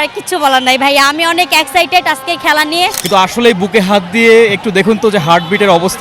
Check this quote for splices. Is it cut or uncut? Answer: cut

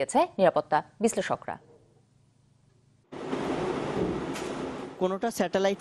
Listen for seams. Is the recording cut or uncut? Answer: cut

